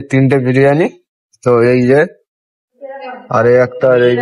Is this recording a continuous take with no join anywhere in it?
yes; 0 cuts

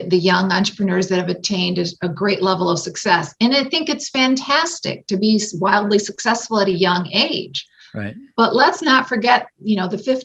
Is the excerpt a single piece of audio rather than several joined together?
yes; 0 cuts

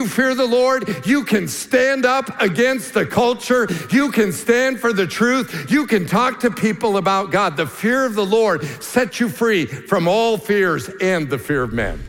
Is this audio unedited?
yes; 0 cuts

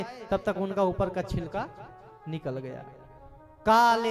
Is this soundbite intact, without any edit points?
yes; 0 cuts

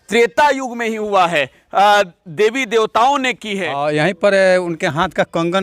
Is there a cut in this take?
yes; 1 cut; at 3.7 s

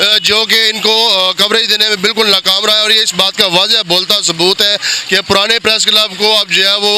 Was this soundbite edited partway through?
no; 0 cuts

